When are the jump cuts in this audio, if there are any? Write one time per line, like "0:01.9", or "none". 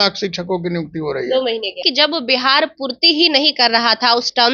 0:01.8

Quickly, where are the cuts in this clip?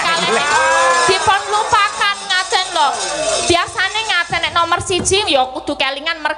none

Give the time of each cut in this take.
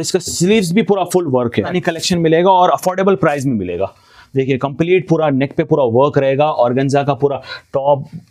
0:01.8

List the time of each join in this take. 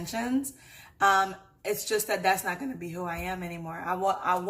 none

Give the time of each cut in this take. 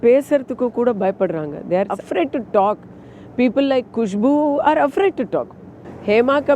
0:02.0

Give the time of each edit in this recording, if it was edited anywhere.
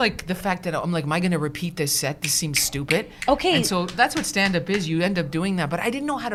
none

